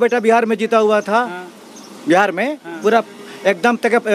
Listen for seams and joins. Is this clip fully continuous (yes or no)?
yes